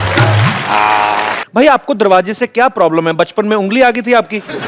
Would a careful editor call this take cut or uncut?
cut